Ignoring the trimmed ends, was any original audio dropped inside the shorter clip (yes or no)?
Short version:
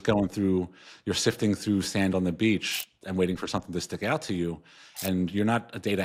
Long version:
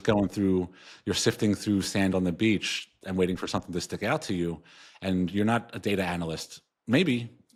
no